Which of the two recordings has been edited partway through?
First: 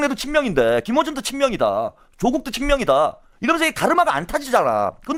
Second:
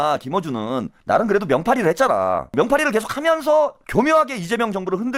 second; 3 cuts; at 0.9 s, 2.5 s, 3.8 s

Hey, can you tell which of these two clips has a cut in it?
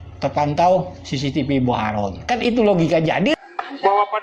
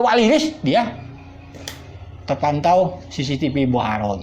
first; 1 cut; at 3.3 s

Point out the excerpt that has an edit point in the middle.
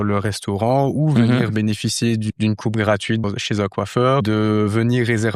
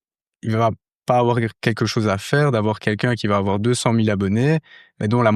first; 3 cuts; at 2.3 s, 3.2 s, 4.2 s

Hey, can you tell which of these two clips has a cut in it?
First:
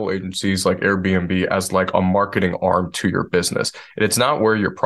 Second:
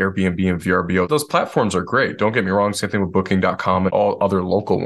second; 2 cuts; at 1.1 s, 3.9 s

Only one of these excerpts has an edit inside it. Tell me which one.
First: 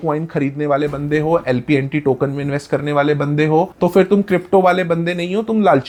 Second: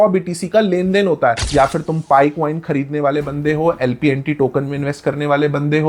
second; 1 cut; at 1.4 s

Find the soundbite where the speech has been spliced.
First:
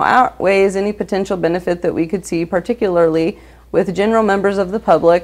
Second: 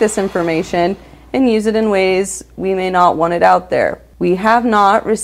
second; 1 cut; at 4.0 s

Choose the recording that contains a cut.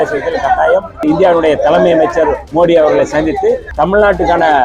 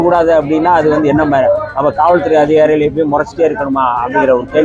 first; 3 cuts; at 1.0 s, 2.4 s, 3.7 s

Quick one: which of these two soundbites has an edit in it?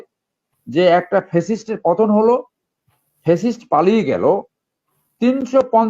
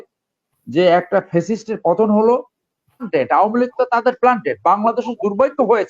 second; 1 cut; at 3.1 s

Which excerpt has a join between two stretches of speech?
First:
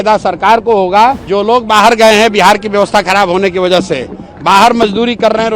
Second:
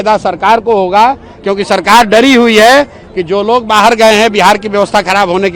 first; 1 cut; at 1.3 s

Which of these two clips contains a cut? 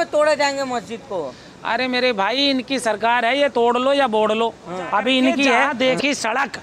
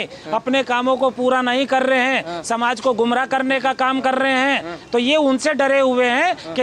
first; 1 cut; at 5.7 s

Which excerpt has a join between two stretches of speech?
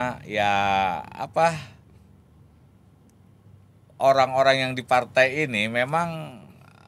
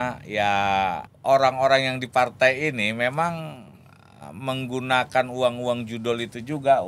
second; 1 cut; at 1.1 s

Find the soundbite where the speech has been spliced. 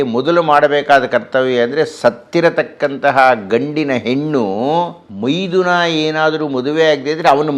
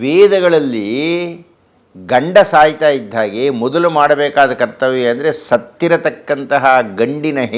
first; 1 cut; at 5.0 s

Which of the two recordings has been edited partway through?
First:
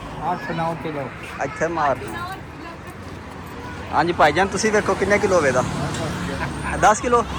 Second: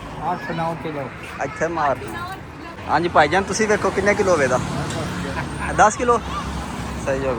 second; 1 cut; at 2.7 s

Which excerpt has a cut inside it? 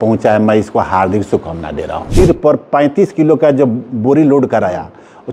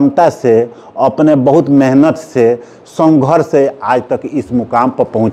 first; 1 cut; at 2.0 s

